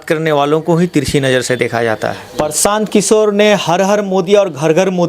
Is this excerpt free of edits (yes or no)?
no